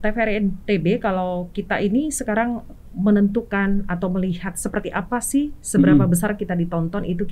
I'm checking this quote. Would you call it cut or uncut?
uncut